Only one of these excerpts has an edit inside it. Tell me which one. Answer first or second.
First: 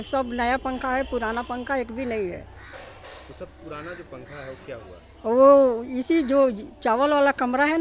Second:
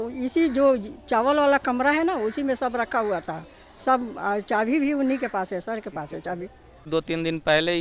second